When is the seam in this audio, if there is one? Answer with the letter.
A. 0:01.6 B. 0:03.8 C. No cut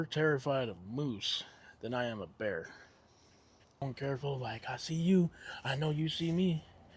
B